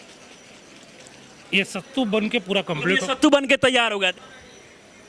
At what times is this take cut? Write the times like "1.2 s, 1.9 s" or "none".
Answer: 4.1 s